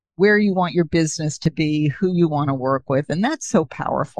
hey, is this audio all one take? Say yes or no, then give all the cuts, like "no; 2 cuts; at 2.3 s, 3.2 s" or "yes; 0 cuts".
yes; 0 cuts